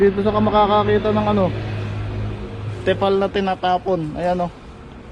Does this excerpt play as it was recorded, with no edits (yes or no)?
yes